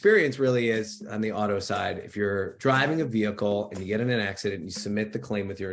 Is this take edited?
no; 0 cuts

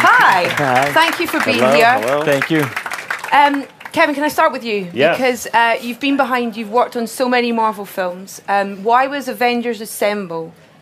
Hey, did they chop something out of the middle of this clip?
no; 0 cuts

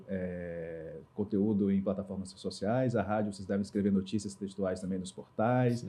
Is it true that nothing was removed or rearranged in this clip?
yes; 0 cuts

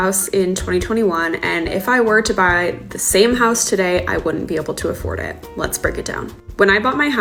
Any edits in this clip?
no; 0 cuts

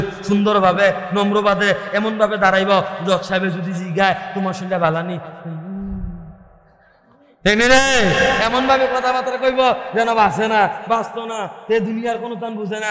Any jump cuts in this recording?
no; 0 cuts

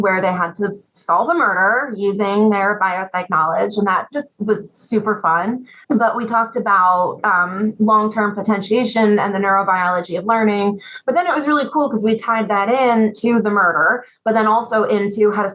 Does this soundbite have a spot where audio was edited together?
yes; 1 cut; at 5.7 s

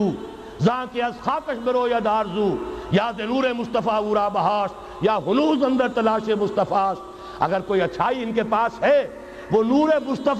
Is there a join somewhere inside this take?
no; 0 cuts

